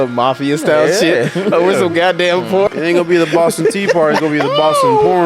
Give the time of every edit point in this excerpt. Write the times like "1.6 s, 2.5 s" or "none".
2.7 s